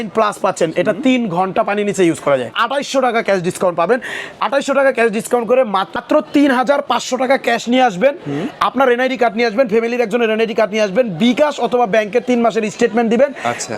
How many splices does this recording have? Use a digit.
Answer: 2